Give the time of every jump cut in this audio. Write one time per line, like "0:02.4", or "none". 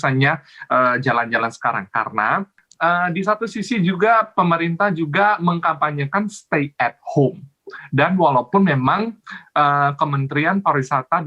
0:02.6